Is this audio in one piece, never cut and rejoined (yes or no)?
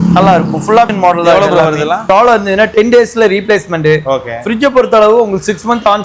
no